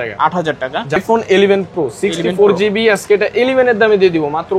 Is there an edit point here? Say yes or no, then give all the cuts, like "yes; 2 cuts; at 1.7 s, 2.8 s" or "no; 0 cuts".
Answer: yes; 1 cut; at 1.0 s